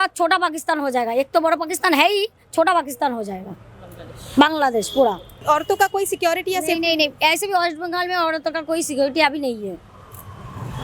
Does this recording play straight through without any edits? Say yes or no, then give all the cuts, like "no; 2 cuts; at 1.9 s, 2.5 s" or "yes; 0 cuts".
yes; 0 cuts